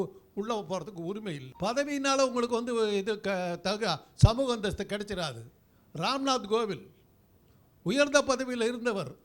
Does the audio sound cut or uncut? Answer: cut